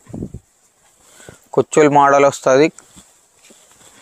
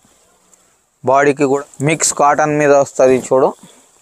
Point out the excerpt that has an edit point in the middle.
second; 1 cut; at 1.6 s

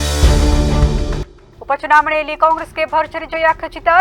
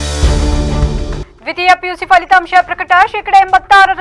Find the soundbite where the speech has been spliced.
second; 1 cut; at 1.3 s

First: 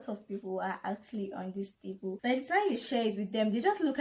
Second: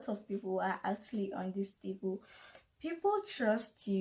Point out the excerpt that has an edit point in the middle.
first; 1 cut; at 2.1 s

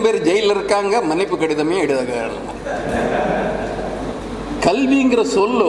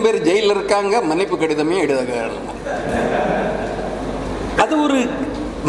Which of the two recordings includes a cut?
first; 1 cut; at 4.2 s

